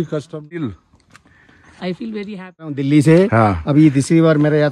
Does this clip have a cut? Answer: yes; 2 cuts; at 0.7 s, 2.8 s

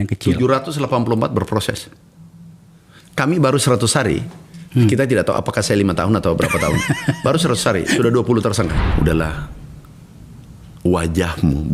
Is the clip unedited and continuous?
no; 1 cut; at 8.8 s

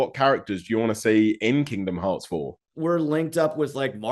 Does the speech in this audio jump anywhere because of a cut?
yes; 1 cut; at 2.6 s

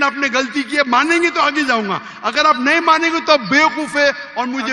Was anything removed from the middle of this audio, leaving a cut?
no; 0 cuts

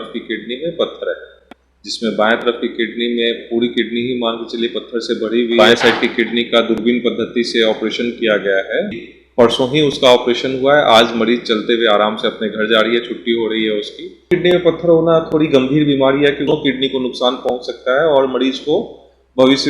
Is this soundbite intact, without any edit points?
no; 4 cuts; at 5.6 s, 9.1 s, 14.3 s, 16.5 s

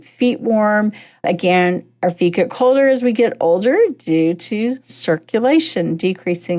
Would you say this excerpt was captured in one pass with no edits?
yes; 0 cuts

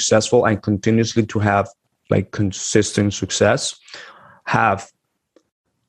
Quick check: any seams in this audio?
no; 0 cuts

